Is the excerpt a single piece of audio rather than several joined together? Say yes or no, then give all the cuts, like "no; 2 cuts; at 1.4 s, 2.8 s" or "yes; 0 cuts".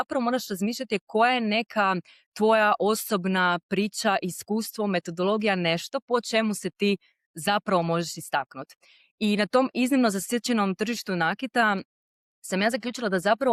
yes; 0 cuts